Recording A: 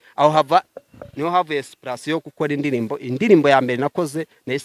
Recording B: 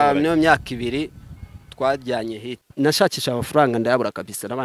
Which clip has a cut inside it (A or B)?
B